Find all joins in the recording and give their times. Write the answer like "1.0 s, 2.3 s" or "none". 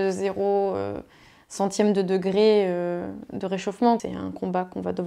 4.0 s